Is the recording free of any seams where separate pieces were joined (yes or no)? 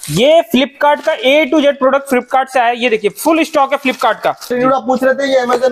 no